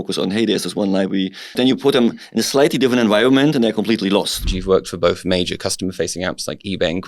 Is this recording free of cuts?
no; 2 cuts; at 1.6 s, 4.5 s

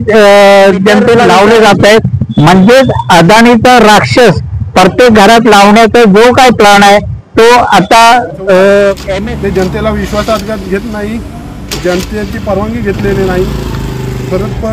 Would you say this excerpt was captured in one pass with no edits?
no; 2 cuts; at 1.2 s, 9.0 s

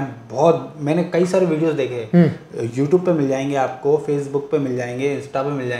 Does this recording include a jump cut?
no; 0 cuts

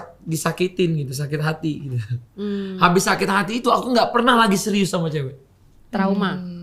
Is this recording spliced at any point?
no; 0 cuts

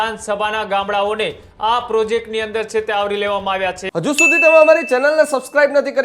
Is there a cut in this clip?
yes; 1 cut; at 3.8 s

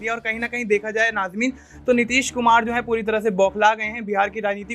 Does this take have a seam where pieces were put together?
no; 0 cuts

